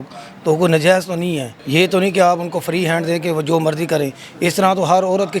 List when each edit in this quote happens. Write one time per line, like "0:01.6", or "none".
0:01.5